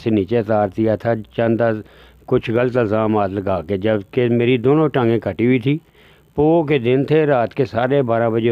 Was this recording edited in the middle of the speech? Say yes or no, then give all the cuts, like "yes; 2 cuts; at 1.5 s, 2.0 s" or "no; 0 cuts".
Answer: no; 0 cuts